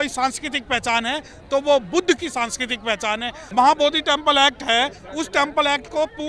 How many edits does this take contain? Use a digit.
1